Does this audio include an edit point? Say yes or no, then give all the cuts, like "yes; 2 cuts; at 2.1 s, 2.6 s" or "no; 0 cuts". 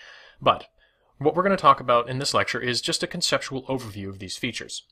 no; 0 cuts